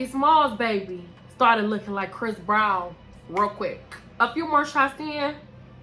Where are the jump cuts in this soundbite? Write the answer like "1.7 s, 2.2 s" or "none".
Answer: none

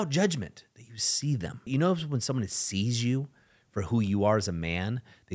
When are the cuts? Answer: 1.7 s

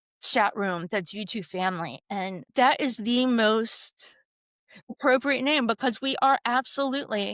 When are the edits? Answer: 2.4 s

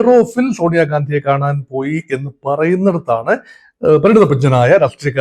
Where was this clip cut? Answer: none

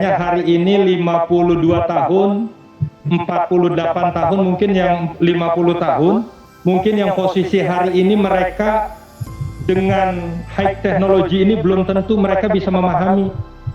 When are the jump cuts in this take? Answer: 6.4 s

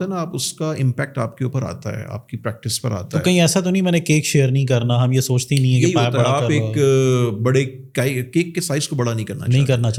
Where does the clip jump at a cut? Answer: none

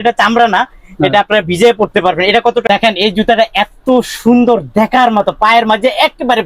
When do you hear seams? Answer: 2.6 s

